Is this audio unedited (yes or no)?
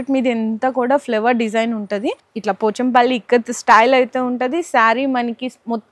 no